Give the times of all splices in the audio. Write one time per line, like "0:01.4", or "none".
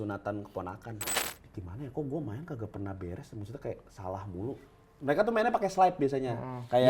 0:01.2